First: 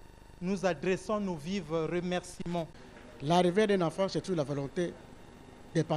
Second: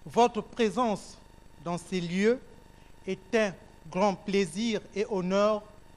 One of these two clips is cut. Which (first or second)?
first